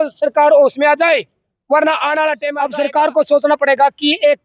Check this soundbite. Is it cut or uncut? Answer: cut